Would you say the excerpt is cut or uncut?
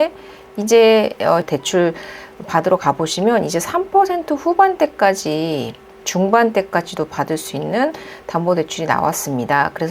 cut